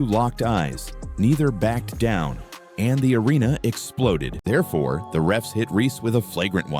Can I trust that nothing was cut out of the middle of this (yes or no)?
no